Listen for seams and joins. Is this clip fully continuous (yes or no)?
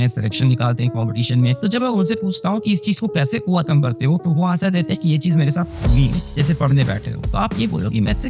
no